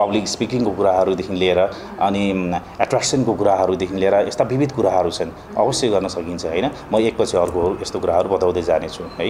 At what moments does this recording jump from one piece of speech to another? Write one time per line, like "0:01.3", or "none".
none